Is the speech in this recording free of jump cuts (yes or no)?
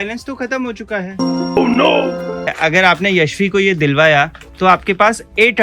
no